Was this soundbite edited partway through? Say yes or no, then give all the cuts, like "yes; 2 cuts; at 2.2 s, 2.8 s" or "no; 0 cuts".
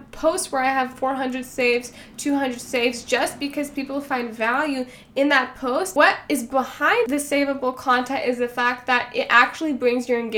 yes; 2 cuts; at 5.9 s, 7.1 s